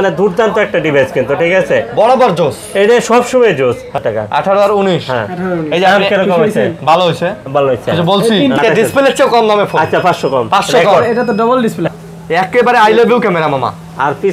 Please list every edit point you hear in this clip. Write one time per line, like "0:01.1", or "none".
0:04.0
0:08.6
0:11.9